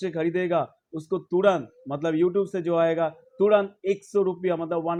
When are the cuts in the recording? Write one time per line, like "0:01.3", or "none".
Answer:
none